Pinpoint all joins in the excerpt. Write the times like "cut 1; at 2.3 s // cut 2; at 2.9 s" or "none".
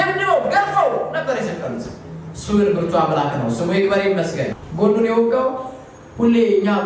cut 1; at 4.6 s